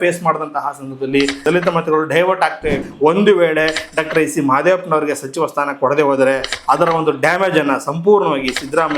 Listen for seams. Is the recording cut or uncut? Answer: cut